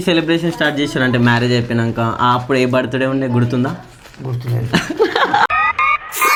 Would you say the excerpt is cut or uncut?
uncut